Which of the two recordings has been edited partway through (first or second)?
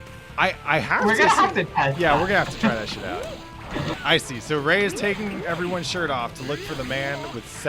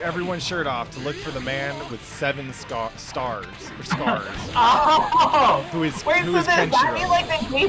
first